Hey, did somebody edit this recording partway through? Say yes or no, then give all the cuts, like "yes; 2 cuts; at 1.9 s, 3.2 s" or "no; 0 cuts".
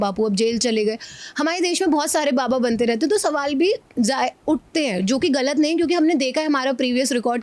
no; 0 cuts